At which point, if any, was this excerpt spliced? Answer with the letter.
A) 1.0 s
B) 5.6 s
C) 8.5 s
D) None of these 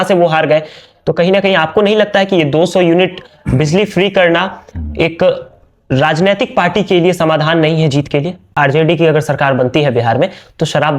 C